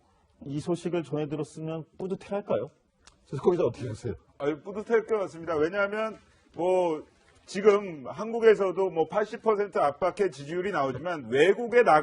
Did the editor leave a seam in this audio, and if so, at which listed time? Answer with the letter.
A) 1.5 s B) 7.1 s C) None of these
B